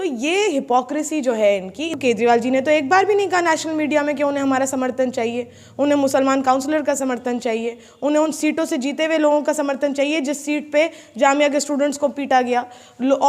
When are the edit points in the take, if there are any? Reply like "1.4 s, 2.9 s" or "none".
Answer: 1.8 s